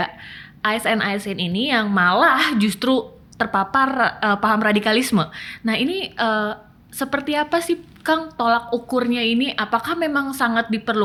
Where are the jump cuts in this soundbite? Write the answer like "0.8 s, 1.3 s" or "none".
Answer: none